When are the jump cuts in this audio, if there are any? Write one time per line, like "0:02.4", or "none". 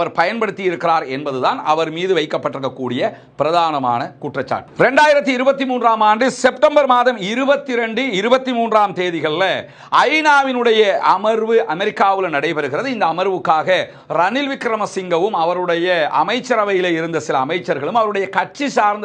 none